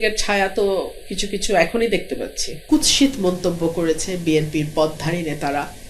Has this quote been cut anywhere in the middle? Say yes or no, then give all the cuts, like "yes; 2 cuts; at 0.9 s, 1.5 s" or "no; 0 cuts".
yes; 1 cut; at 2.6 s